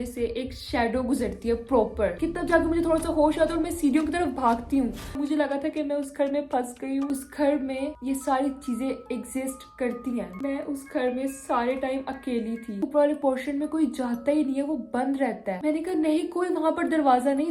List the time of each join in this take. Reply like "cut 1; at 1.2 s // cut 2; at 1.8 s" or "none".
cut 1; at 2.2 s // cut 2; at 5.2 s // cut 3; at 7.1 s // cut 4; at 10.3 s // cut 5; at 12.8 s // cut 6; at 15.6 s